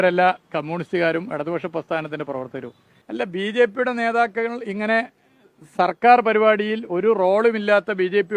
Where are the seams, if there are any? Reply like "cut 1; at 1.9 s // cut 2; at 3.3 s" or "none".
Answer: cut 1; at 3.0 s